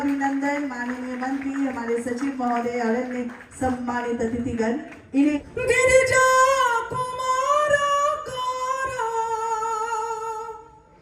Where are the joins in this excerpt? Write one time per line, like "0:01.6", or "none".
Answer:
0:05.5